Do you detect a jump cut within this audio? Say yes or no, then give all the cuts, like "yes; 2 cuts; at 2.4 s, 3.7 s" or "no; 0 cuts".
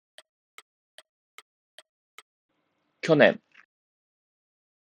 no; 0 cuts